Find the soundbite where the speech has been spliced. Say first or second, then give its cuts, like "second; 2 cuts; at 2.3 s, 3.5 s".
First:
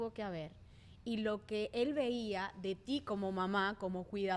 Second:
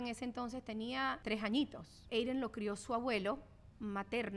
second; 2 cuts; at 1.2 s, 2.0 s